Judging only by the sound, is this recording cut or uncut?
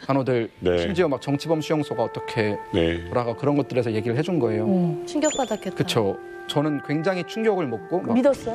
uncut